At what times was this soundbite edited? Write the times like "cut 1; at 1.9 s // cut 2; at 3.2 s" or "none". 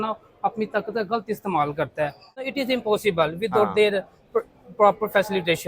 cut 1; at 2.3 s